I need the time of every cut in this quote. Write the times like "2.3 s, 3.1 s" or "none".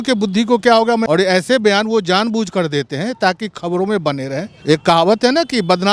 1.0 s, 4.5 s